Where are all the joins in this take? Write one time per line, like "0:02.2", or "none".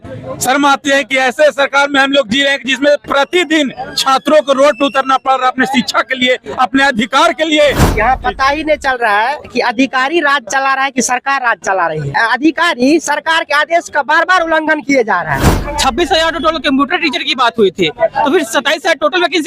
0:07.9
0:12.1
0:15.5